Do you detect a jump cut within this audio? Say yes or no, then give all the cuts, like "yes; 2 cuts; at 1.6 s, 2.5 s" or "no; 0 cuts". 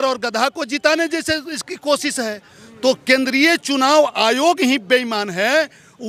no; 0 cuts